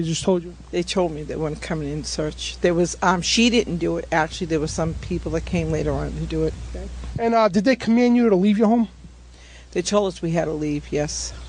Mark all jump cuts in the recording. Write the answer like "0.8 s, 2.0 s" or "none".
none